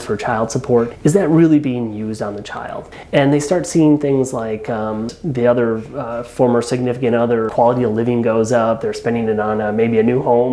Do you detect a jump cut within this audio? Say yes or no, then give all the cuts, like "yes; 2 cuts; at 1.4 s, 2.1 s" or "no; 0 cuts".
yes; 4 cuts; at 0.9 s, 2.9 s, 5.1 s, 7.5 s